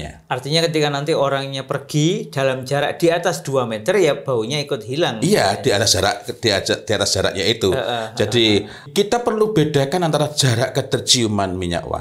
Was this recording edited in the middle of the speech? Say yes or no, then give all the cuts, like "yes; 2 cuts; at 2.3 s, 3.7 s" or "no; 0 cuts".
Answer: yes; 1 cut; at 8.9 s